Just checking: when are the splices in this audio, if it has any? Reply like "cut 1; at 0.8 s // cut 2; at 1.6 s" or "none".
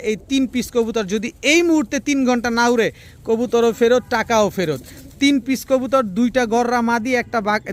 none